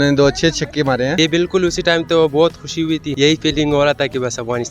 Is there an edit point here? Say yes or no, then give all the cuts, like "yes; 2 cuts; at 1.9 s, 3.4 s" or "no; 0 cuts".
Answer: yes; 1 cut; at 1.2 s